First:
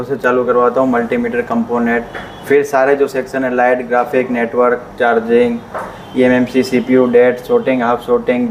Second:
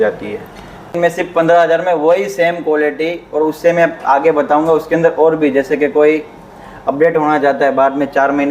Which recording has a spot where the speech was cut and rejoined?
second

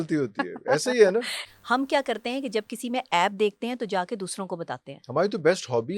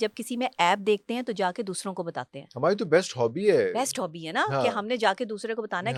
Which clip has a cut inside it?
first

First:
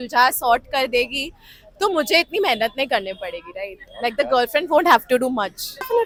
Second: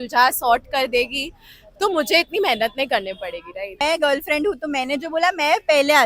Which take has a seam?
second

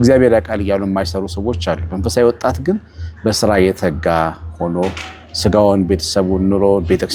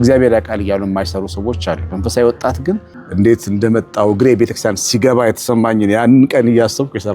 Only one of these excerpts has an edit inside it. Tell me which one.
second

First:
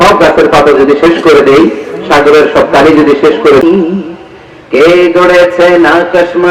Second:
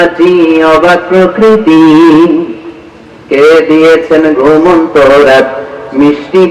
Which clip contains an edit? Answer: first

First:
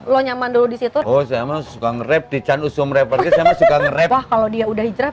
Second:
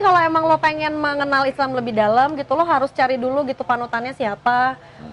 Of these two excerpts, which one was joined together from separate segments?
first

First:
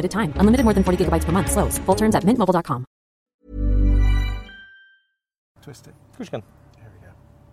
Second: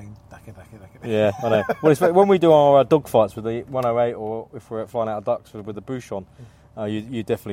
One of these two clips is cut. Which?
first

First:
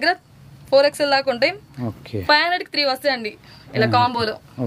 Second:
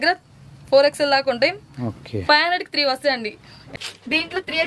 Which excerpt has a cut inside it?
second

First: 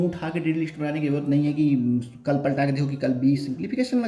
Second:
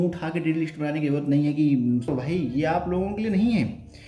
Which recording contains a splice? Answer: second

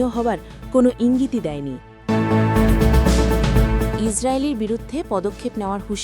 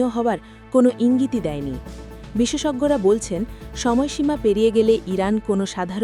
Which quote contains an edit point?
first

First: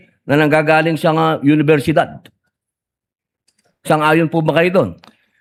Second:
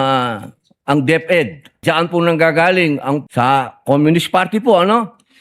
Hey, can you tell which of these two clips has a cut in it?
second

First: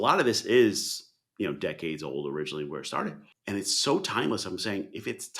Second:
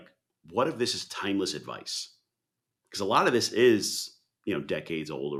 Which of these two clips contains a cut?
first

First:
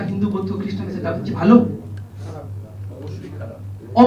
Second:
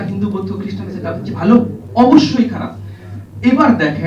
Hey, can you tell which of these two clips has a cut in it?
second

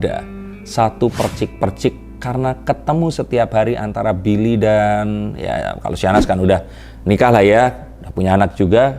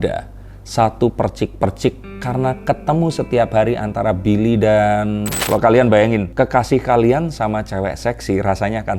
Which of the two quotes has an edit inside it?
second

